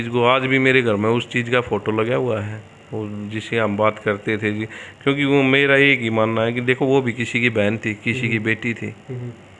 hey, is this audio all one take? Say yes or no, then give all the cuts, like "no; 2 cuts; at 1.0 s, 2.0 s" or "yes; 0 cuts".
yes; 0 cuts